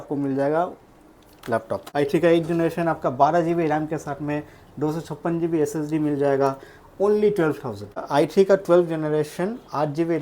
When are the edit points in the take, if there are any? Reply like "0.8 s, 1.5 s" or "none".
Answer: 1.9 s, 8.0 s